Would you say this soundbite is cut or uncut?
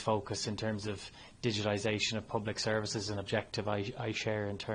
uncut